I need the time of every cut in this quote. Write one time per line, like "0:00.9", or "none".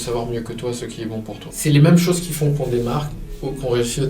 0:01.5